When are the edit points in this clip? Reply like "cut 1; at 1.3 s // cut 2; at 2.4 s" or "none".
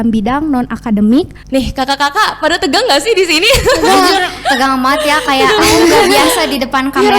cut 1; at 1.4 s